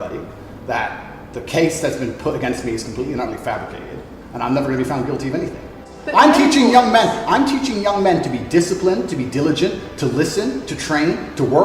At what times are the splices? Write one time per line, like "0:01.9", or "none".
0:05.9